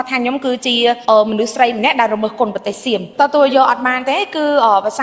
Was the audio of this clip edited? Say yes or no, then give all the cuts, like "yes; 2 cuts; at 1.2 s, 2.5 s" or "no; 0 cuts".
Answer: yes; 2 cuts; at 1.0 s, 3.1 s